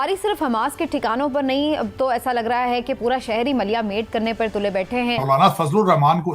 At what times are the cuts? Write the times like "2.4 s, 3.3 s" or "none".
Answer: 5.2 s